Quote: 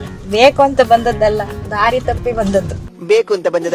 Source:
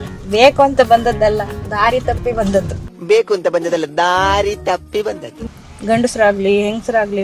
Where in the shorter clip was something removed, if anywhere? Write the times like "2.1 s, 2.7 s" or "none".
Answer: none